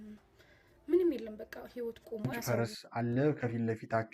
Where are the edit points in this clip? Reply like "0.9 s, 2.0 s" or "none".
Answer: 2.4 s